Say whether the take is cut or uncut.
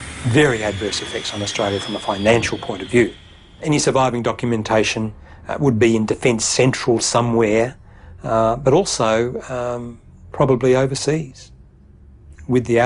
cut